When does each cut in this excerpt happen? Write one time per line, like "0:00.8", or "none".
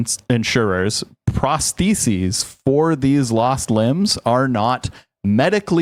none